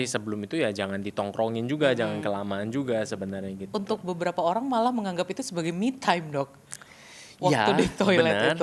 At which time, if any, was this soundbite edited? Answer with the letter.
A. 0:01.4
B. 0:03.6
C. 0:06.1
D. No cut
B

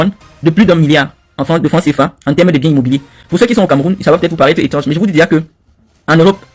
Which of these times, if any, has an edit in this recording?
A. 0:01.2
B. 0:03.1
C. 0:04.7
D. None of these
D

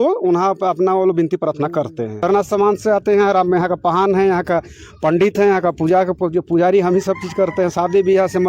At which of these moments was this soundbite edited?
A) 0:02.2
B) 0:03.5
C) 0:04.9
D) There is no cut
A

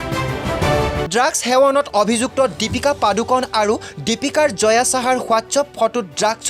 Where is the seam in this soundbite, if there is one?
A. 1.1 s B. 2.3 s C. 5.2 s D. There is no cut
A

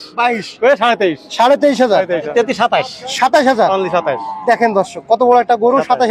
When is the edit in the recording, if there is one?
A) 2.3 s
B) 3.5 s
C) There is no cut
A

